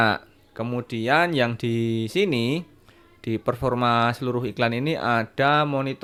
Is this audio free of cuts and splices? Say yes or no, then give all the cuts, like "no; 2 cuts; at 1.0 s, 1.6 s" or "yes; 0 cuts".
yes; 0 cuts